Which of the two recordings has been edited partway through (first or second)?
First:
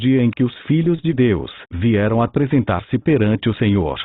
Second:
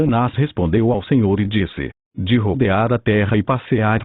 second